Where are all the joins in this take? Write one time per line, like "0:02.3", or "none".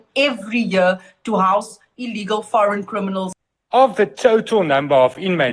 0:03.3